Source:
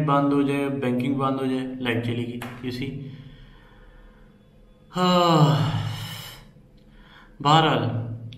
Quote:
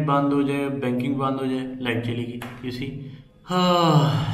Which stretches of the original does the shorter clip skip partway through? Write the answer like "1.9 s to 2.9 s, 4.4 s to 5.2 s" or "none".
3.3 s to 4.7 s

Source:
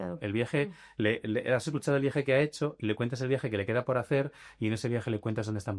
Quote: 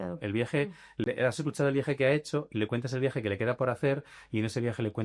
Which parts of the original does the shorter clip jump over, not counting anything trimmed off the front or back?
1.0 s to 1.3 s

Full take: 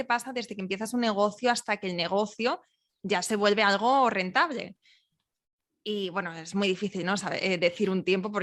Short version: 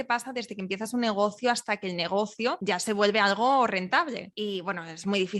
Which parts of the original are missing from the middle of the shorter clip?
2.6 s to 3.0 s, 4.7 s to 5.8 s

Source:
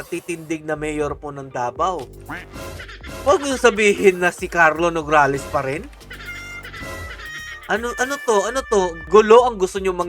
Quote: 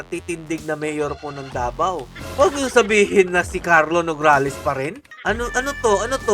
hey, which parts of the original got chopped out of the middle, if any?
2.2 s to 3.0 s, 5.9 s to 7.5 s

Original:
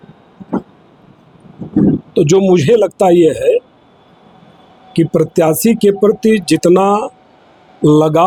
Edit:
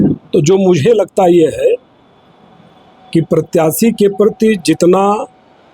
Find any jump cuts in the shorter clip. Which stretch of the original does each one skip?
none

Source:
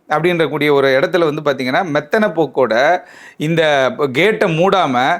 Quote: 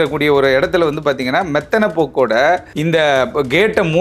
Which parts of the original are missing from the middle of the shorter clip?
3.1 s to 3.4 s

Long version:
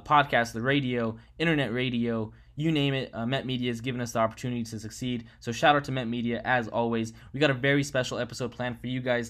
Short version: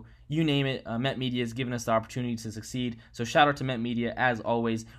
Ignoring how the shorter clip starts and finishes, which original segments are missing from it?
none

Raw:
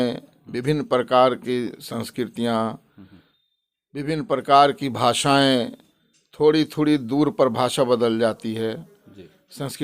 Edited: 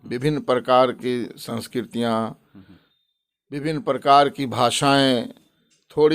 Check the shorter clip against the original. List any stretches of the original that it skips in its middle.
none

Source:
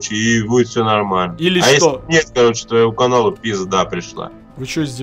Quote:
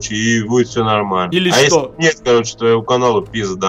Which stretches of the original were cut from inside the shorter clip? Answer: 1.3 s to 1.4 s

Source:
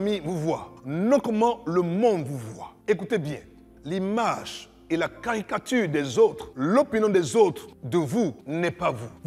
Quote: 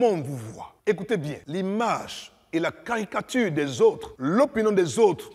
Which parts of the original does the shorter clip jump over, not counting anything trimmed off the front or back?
3.4 s to 3.7 s

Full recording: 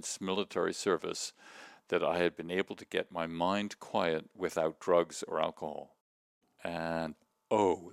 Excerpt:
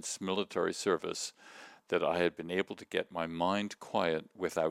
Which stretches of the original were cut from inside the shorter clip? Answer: none

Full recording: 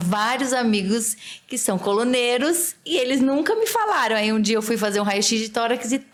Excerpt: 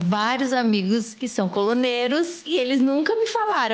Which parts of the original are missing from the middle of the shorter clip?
1.2 s to 1.5 s, 2.7 s to 2.8 s

